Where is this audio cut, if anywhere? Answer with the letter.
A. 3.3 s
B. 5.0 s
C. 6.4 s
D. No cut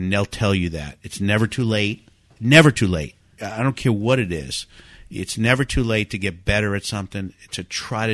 A